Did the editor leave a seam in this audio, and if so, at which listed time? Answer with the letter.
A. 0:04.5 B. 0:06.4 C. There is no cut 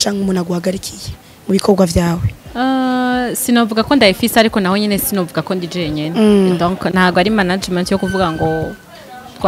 C